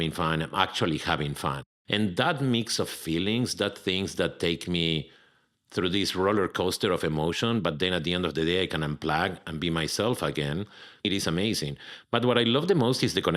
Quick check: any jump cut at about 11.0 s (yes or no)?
yes